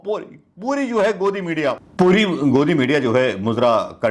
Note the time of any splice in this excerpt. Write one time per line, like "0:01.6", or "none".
0:01.8